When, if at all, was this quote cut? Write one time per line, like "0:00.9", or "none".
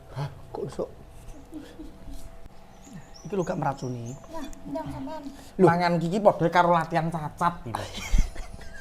0:02.4